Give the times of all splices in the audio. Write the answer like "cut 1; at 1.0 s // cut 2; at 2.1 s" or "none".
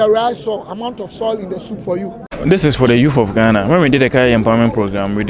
cut 1; at 2.3 s